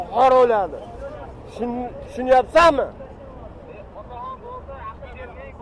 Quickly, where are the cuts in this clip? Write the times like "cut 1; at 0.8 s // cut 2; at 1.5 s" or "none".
none